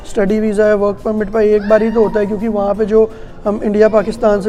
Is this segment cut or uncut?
uncut